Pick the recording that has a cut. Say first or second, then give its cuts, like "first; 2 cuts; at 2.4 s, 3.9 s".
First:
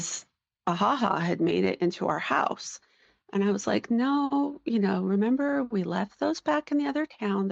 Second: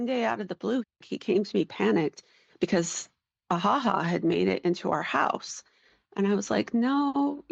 second; 1 cut; at 1.0 s